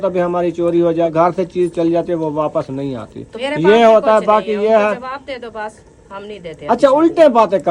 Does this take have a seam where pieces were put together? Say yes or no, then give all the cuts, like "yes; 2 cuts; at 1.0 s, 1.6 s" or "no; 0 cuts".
yes; 1 cut; at 1.1 s